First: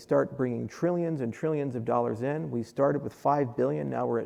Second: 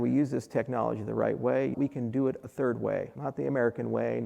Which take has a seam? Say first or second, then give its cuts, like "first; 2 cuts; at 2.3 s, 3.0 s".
second; 2 cuts; at 1.7 s, 3.2 s